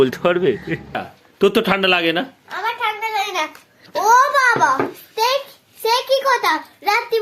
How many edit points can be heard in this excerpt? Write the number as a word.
one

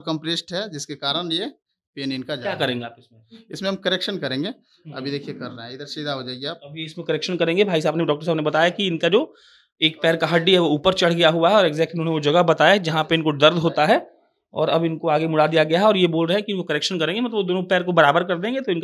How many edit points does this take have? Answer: zero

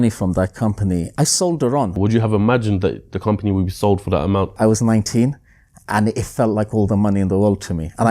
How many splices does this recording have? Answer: three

